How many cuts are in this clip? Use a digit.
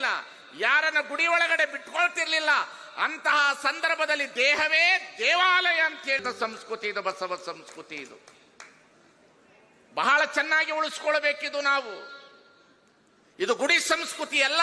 1